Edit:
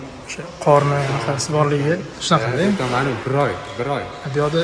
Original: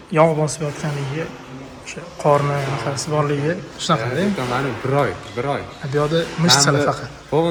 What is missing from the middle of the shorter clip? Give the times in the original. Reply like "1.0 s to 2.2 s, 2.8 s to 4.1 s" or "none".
none